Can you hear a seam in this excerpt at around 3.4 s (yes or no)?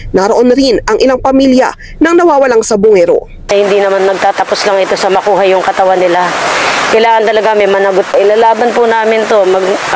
yes